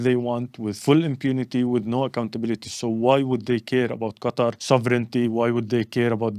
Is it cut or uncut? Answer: cut